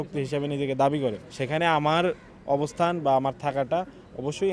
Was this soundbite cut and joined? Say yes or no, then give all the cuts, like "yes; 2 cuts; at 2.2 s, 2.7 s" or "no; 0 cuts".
yes; 1 cut; at 1.3 s